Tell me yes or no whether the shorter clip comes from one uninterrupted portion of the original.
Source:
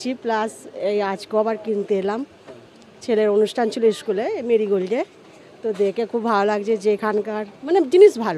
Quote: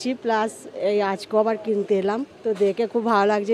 no